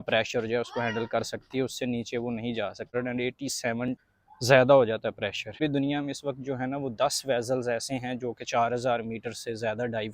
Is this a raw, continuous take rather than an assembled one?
no; 2 cuts; at 2.9 s, 5.6 s

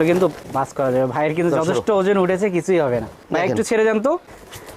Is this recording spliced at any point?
yes; 1 cut; at 3.2 s

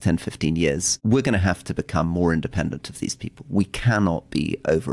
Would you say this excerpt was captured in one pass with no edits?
no; 1 cut; at 0.9 s

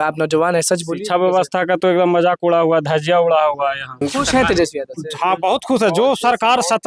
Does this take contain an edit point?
yes; 1 cut; at 3.9 s

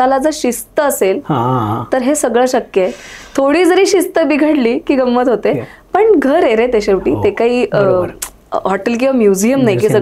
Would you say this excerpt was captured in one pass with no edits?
yes; 0 cuts

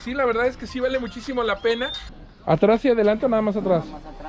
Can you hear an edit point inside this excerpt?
yes; 1 cut; at 2.1 s

